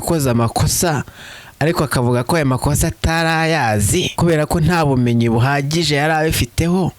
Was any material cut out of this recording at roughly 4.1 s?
yes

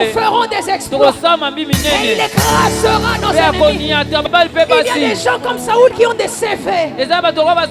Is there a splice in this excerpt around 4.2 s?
yes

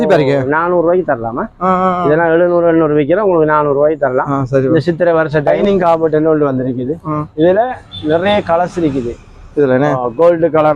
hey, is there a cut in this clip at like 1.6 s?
no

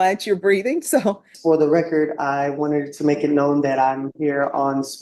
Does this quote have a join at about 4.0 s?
no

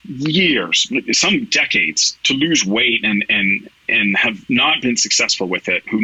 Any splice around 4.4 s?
no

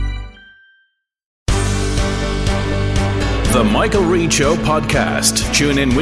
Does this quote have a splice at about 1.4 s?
yes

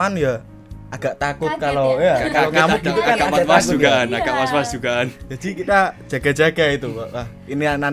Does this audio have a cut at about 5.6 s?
no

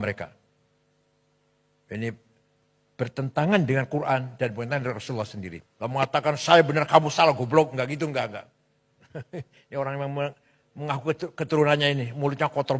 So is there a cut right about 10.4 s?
no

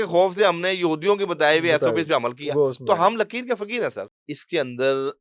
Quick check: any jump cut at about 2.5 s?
no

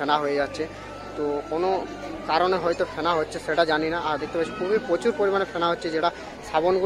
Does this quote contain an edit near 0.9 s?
yes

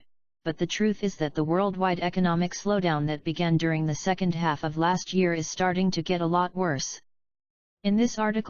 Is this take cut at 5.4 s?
yes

